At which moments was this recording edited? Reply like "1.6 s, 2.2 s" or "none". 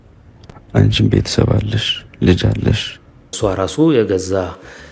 3.3 s